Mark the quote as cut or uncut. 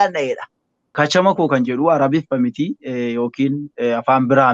cut